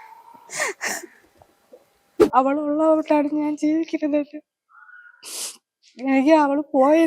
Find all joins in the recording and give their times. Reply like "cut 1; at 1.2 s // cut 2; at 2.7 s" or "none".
cut 1; at 2.2 s